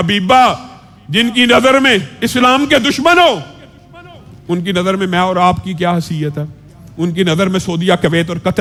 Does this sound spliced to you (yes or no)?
no